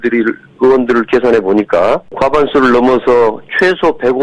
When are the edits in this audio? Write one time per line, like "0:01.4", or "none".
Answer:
0:02.2